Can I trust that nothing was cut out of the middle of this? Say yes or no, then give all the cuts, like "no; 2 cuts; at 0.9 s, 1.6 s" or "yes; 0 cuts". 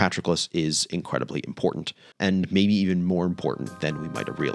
no; 1 cut; at 2.1 s